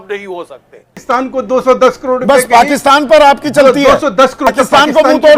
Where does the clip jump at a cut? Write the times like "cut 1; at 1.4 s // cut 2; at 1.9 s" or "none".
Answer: cut 1; at 1.0 s // cut 2; at 4.5 s